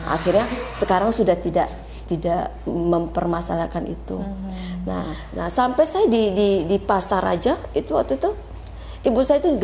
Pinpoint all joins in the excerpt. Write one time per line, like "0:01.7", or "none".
0:05.2